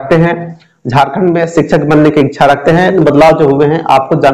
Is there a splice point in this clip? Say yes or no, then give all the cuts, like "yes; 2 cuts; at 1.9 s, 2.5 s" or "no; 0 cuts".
yes; 1 cut; at 2.9 s